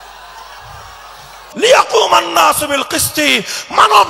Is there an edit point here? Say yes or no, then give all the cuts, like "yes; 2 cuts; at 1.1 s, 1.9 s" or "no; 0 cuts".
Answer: yes; 1 cut; at 1.4 s